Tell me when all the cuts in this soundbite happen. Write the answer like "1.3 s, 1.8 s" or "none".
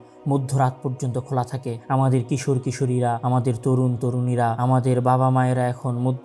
1.8 s, 3.2 s, 4.6 s